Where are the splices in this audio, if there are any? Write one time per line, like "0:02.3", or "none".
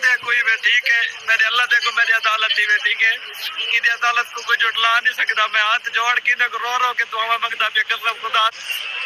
none

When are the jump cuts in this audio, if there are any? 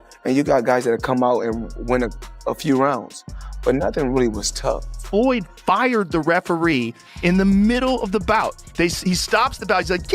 0:04.9

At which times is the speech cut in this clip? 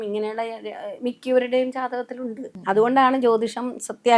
0:02.5

